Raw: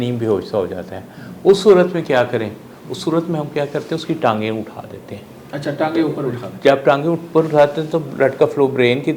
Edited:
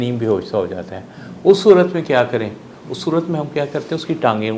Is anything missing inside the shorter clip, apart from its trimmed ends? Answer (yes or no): no